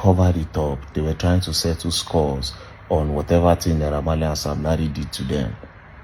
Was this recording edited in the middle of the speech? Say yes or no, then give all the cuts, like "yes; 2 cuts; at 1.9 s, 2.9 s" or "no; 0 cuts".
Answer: no; 0 cuts